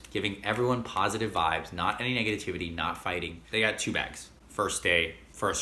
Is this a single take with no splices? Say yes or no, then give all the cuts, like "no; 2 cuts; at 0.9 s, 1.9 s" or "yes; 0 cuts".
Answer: no; 1 cut; at 3.4 s